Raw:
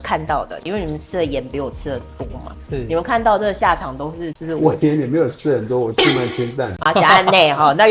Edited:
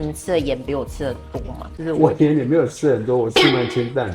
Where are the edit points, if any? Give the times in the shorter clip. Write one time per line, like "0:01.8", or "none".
0:01.7